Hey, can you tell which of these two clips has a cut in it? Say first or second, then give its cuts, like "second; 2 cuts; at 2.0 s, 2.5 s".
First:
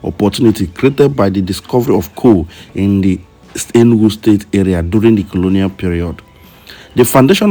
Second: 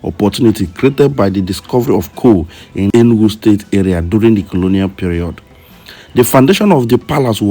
second; 1 cut; at 2.9 s